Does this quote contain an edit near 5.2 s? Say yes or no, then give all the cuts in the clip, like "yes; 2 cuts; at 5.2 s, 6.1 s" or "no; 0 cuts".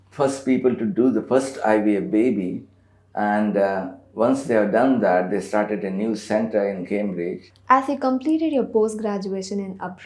no; 1 cut; at 7.5 s